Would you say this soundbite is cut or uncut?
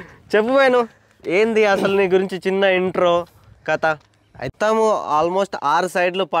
cut